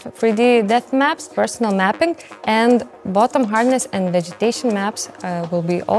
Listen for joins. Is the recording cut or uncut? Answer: cut